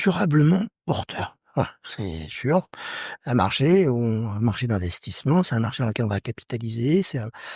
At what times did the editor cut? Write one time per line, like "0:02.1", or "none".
none